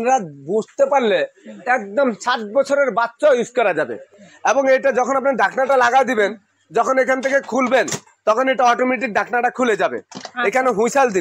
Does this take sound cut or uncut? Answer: uncut